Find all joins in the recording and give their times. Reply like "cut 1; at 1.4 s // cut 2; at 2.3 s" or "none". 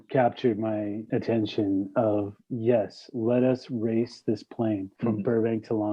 cut 1; at 4.9 s